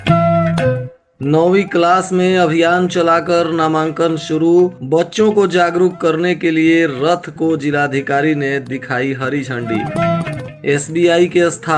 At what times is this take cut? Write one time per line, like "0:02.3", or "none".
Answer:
0:00.9

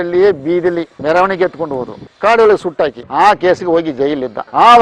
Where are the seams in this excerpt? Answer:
0:00.9
0:03.0

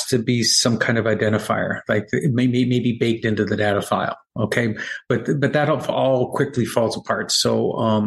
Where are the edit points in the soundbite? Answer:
none

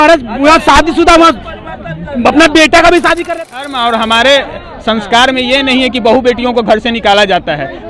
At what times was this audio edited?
0:03.4

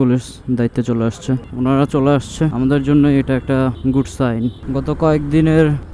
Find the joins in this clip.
0:01.5
0:04.6

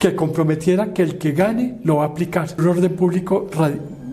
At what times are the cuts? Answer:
0:02.6

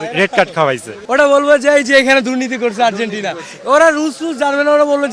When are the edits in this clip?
0:00.9

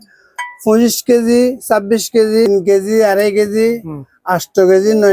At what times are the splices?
0:02.5

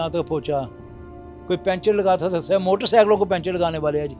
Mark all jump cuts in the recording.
none

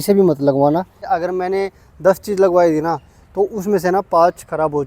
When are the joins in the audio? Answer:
0:01.0

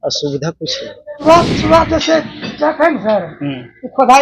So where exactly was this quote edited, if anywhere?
0:01.2

